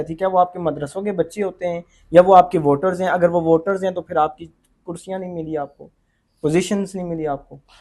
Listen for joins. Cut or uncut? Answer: uncut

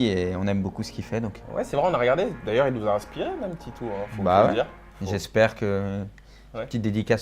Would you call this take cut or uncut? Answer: cut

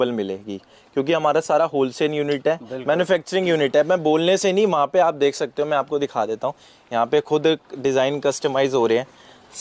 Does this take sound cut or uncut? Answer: uncut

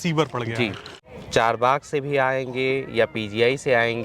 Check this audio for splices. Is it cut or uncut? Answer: cut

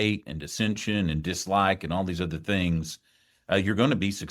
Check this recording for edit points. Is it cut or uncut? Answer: uncut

